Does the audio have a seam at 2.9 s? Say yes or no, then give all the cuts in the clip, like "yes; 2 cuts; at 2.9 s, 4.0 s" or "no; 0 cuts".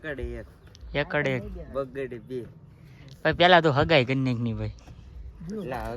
yes; 1 cut; at 2.9 s